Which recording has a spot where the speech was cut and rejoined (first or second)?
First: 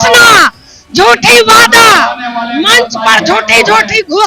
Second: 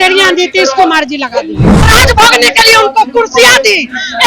second